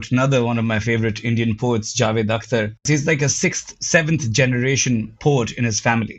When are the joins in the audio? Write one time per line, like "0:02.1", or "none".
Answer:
0:02.9